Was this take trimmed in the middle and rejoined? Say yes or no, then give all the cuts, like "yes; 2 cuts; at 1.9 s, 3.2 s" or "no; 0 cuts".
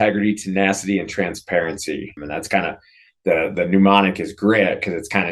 yes; 1 cut; at 2.2 s